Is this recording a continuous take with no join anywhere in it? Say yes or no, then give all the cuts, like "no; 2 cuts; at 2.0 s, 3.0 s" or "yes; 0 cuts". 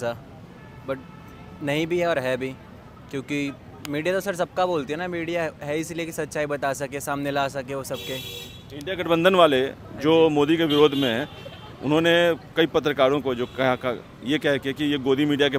yes; 0 cuts